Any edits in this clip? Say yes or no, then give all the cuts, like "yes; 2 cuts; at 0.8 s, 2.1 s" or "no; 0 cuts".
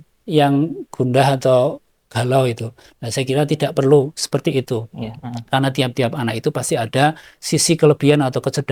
no; 0 cuts